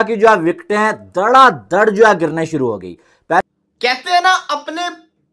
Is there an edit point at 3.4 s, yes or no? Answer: yes